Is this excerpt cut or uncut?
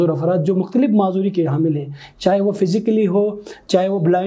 uncut